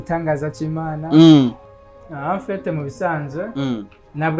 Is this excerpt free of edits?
no; 1 cut; at 1.7 s

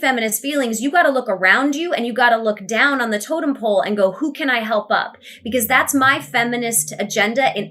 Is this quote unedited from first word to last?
yes; 0 cuts

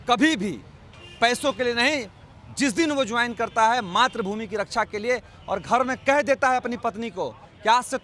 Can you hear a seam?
no; 0 cuts

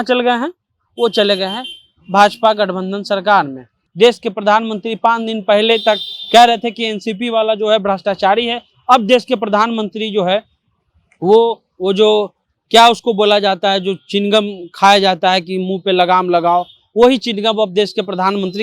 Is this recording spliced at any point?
yes; 1 cut; at 3.8 s

